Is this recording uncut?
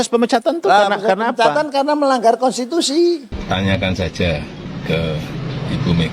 no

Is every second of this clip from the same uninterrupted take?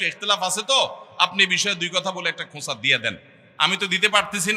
yes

